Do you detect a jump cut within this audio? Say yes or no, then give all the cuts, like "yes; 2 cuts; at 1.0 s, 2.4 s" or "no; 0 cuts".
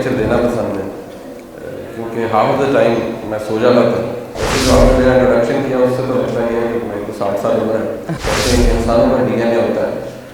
yes; 2 cuts; at 4.4 s, 8.1 s